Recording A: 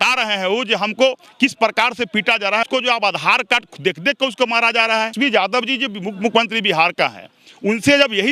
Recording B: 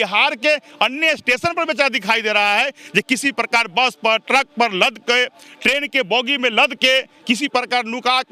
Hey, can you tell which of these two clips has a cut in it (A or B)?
A